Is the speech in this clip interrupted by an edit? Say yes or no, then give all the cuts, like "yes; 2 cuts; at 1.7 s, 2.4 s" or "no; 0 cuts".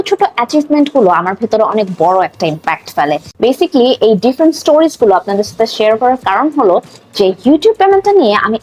yes; 1 cut; at 3.3 s